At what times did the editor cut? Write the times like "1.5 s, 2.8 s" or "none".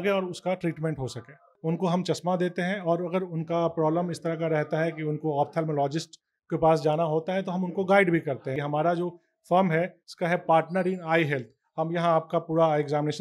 1.5 s, 8.6 s